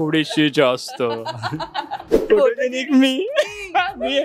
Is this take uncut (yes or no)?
no